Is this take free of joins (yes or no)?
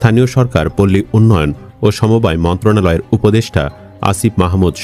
yes